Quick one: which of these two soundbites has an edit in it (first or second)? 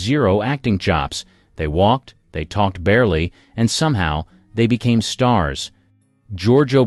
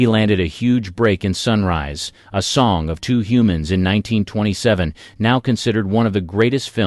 second